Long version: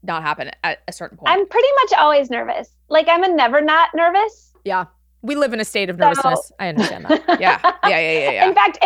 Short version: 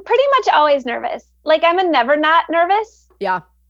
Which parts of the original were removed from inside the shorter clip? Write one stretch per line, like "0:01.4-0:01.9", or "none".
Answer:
none